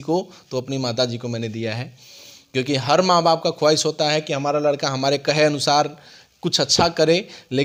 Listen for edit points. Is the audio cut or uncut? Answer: uncut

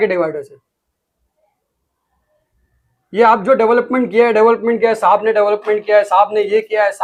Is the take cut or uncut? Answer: uncut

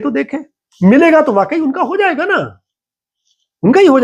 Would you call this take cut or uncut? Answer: uncut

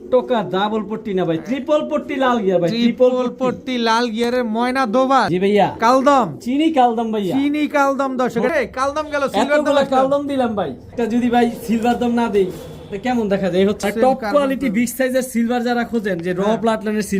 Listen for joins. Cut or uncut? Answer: cut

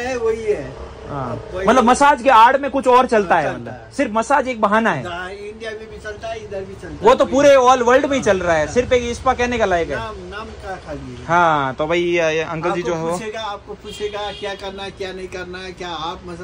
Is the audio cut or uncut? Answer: uncut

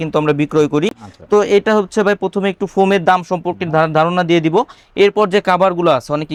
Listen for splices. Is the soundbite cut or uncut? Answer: uncut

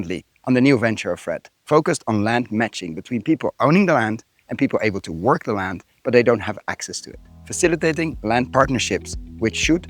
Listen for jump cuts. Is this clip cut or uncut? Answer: cut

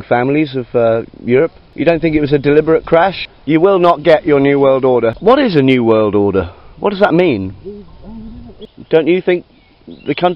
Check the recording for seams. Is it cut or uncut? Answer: cut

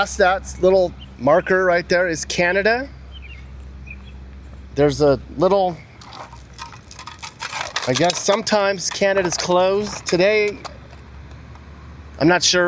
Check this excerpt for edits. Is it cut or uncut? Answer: cut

